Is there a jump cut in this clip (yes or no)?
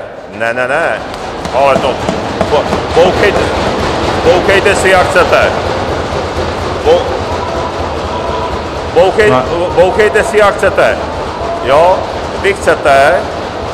no